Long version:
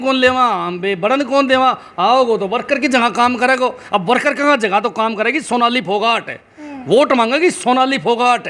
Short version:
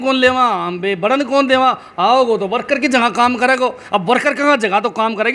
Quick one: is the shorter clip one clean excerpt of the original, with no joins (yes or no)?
yes